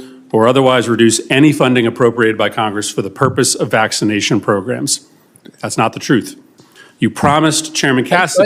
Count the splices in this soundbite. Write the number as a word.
one